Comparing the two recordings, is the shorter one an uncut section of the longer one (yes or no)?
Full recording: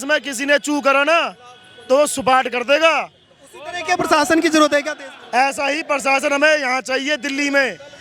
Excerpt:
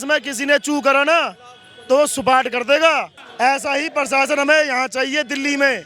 no